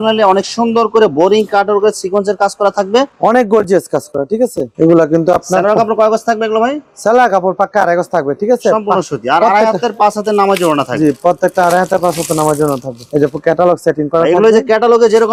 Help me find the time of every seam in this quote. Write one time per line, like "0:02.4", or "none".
none